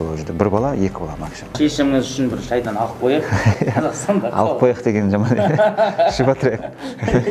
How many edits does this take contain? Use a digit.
1